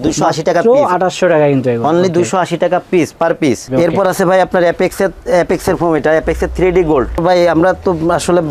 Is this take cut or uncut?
cut